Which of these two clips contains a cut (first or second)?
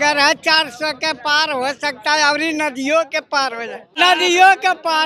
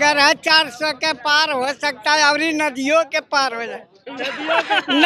first